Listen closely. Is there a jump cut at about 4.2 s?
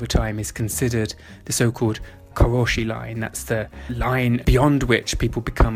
yes; 2 cuts; at 2.2 s, 4.2 s

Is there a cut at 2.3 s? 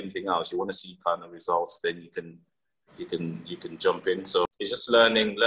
no; 1 cut; at 4.5 s

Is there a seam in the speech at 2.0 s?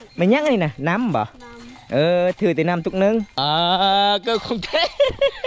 no; 1 cut; at 3.4 s

